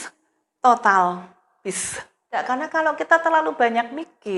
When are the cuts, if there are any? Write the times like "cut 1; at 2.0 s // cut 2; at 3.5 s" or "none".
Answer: cut 1; at 2.4 s